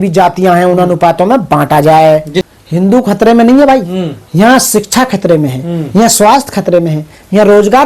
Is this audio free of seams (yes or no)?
no